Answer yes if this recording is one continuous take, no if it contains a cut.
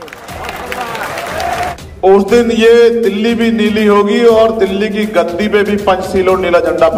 no